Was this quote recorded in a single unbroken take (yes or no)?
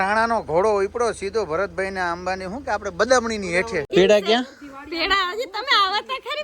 no